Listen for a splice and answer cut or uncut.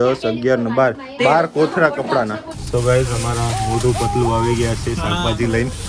cut